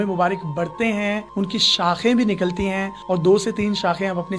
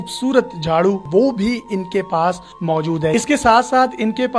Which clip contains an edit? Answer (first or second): second